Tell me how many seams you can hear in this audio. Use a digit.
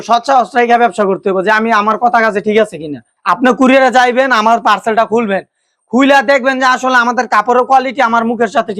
0